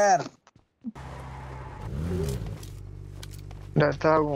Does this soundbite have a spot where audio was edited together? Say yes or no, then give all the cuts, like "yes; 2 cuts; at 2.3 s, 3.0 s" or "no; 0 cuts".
yes; 1 cut; at 1.1 s